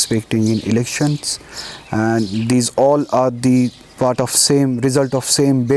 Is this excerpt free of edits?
yes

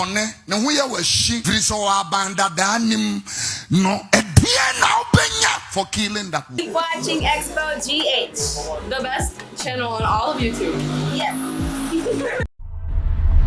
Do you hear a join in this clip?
yes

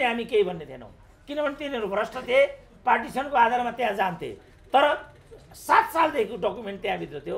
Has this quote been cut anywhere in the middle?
no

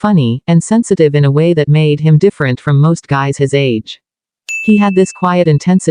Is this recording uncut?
yes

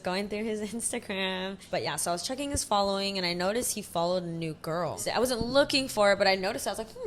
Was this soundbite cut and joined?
yes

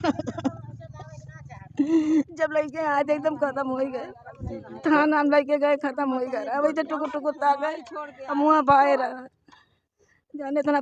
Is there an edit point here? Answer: no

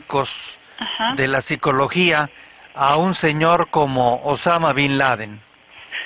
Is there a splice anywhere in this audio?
yes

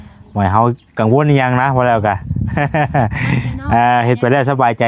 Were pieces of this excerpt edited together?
no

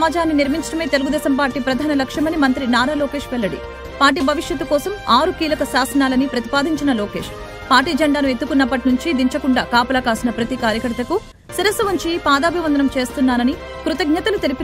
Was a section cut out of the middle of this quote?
no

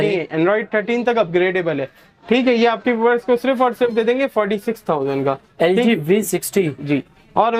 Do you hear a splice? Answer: no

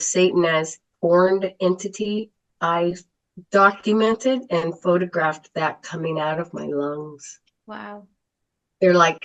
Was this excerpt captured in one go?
no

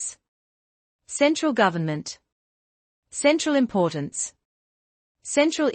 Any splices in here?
yes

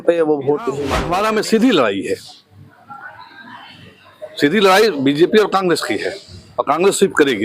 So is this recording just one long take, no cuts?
no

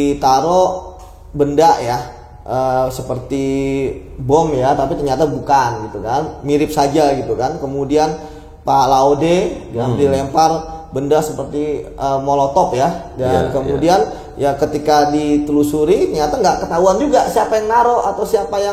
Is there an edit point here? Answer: no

